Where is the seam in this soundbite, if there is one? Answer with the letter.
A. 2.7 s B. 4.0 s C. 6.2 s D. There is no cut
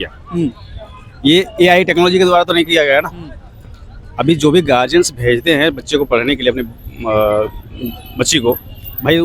D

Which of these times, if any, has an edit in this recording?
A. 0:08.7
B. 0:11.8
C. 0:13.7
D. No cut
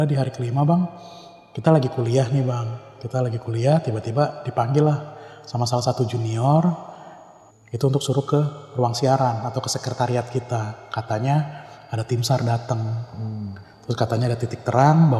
D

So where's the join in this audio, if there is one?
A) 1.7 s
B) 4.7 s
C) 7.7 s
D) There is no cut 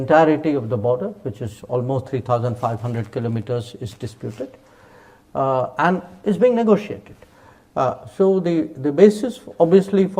D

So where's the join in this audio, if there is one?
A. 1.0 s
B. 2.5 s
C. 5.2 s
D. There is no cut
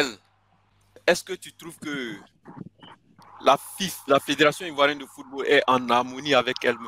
A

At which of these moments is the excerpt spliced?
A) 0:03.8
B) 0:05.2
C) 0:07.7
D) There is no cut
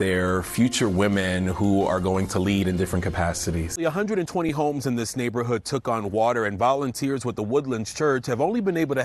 A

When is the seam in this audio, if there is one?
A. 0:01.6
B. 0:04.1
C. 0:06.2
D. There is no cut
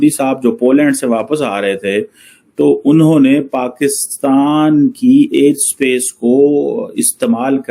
D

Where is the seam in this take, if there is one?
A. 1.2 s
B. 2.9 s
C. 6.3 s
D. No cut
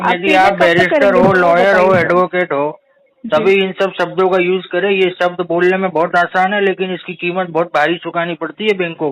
D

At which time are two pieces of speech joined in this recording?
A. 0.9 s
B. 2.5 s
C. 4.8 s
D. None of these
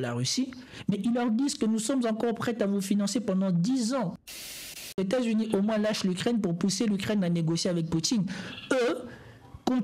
C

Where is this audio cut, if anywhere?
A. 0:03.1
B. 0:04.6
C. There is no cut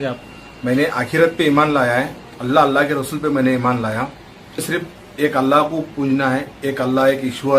B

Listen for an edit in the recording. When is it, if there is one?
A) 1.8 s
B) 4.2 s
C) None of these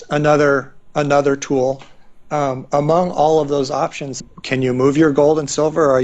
B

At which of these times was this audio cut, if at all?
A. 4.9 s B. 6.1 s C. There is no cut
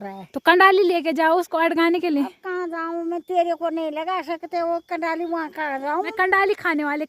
B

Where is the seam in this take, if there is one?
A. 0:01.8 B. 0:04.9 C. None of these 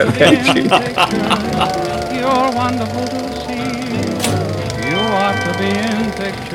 A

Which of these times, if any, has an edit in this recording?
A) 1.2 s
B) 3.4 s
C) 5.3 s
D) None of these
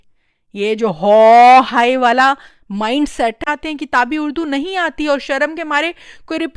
B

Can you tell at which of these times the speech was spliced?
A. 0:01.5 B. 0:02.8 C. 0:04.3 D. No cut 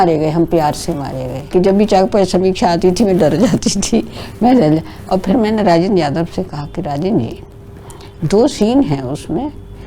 A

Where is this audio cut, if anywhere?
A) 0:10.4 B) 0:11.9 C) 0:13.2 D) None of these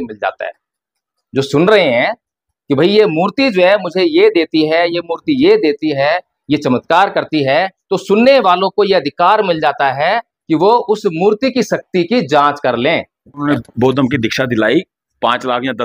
C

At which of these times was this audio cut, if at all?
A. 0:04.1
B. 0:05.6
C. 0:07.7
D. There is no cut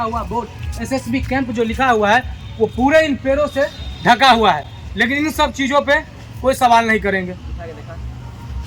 D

